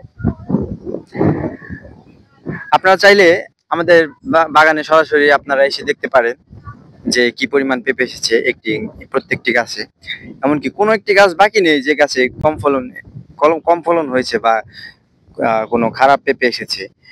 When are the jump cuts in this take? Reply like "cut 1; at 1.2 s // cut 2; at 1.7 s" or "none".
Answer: none